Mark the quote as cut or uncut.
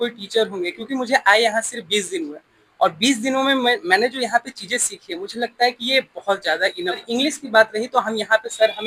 cut